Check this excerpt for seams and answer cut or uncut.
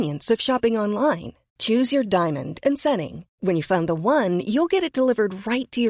uncut